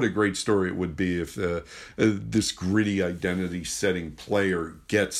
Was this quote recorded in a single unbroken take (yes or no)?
yes